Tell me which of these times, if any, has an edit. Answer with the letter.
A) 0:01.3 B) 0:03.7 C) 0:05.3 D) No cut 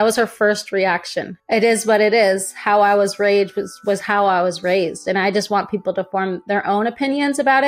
A